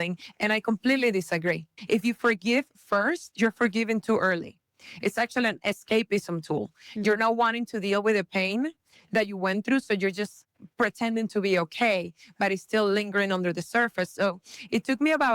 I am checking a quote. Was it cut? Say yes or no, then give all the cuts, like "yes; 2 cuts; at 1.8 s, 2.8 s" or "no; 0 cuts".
yes; 1 cut; at 1.7 s